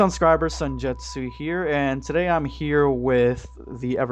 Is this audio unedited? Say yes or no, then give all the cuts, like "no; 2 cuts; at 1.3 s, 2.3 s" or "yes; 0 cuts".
yes; 0 cuts